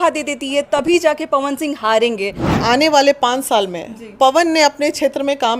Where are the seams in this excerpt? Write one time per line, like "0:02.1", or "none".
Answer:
0:02.5

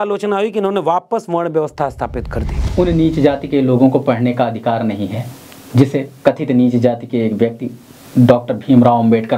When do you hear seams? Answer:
0:02.6

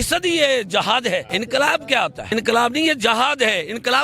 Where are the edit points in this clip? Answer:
0:01.3
0:02.2

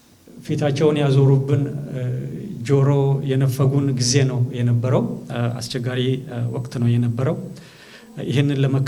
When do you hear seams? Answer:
none

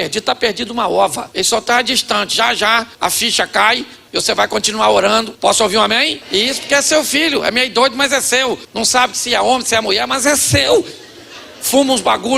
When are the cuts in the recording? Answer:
0:01.2
0:02.9
0:03.9
0:05.3
0:06.2
0:08.7

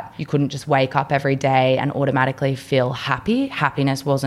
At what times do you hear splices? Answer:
none

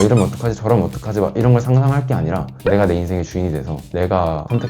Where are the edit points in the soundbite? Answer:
0:02.5

